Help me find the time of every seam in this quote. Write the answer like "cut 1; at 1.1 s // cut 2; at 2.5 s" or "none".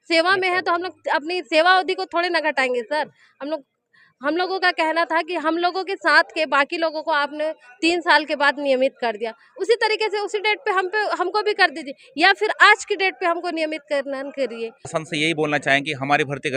cut 1; at 14.9 s